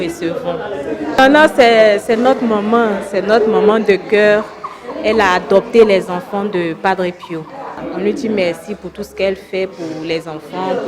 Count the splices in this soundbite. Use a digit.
2